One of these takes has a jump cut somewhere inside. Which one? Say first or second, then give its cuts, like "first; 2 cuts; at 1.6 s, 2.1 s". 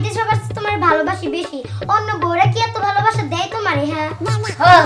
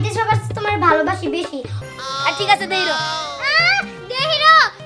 second; 1 cut; at 1.7 s